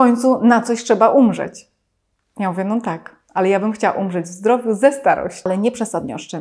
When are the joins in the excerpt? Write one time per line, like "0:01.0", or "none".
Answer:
0:05.5